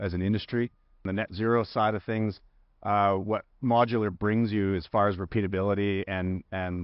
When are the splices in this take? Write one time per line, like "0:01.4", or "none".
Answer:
0:01.1